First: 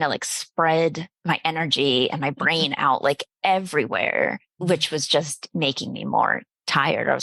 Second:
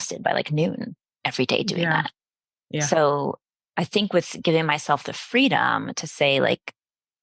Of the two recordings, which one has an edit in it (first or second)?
first